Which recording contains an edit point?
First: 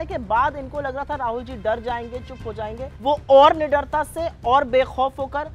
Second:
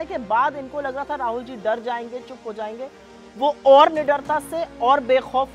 first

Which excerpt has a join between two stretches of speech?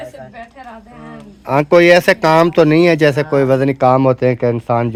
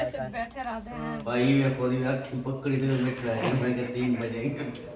second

